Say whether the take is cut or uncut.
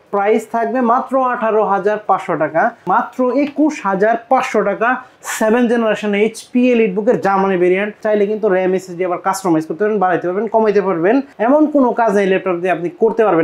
cut